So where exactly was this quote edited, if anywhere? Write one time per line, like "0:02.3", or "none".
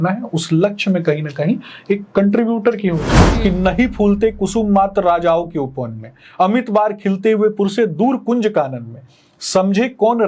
0:03.2